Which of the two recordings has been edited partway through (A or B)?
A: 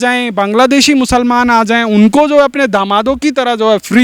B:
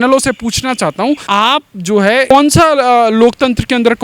B